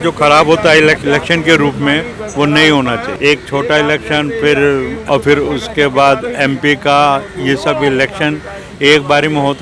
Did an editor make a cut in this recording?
yes; 3 cuts; at 1.0 s, 3.1 s, 5.0 s

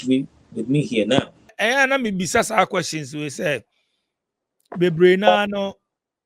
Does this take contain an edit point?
yes; 1 cut; at 1.5 s

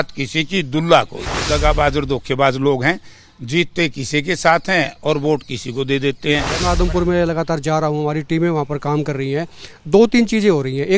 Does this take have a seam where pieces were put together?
yes; 2 cuts; at 1.4 s, 6.5 s

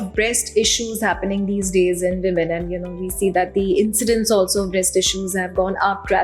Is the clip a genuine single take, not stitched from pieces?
yes; 0 cuts

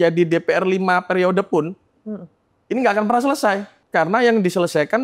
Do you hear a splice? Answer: yes; 1 cut; at 3.7 s

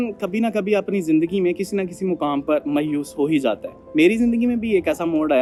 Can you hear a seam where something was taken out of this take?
no; 0 cuts

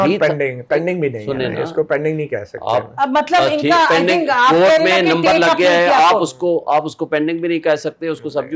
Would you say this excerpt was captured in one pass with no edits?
yes; 0 cuts

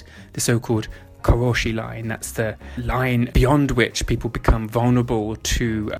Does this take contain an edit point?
yes; 2 cuts; at 1.0 s, 3.1 s

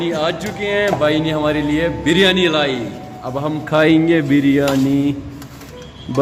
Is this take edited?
no; 0 cuts

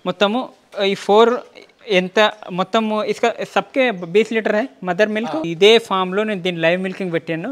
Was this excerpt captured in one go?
no; 1 cut; at 5.5 s

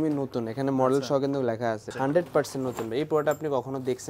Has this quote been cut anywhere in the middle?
yes; 1 cut; at 1.9 s

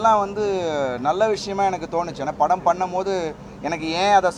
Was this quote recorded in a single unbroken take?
yes; 0 cuts

